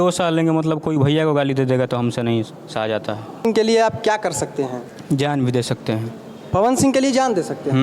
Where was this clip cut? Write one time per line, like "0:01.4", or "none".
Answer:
0:03.5